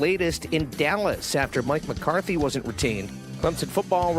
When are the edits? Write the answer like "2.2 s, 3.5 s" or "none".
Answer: 3.2 s